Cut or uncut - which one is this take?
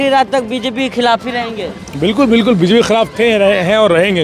uncut